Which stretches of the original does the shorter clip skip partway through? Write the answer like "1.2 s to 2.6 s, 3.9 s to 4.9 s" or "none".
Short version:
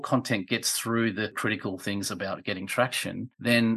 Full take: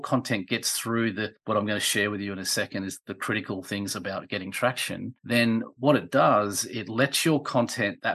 1.4 s to 3.2 s